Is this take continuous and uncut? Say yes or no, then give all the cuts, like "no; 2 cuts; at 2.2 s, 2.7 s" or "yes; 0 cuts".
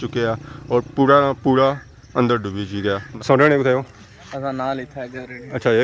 no; 1 cut; at 3.1 s